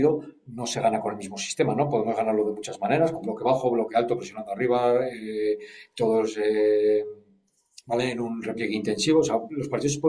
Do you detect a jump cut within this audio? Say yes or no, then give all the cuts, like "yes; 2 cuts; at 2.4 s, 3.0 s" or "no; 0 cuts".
no; 0 cuts